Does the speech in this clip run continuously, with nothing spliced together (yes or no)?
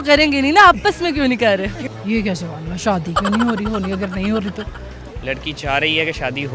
no